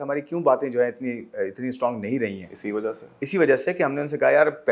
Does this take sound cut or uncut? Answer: uncut